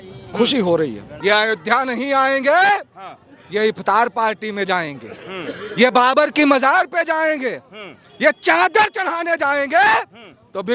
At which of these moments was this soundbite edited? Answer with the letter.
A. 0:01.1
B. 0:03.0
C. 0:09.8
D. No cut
A